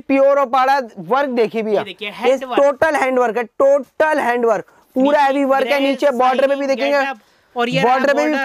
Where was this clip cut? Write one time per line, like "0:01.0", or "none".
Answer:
none